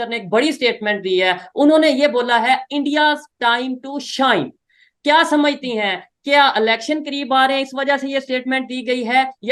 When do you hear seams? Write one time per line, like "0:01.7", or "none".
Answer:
none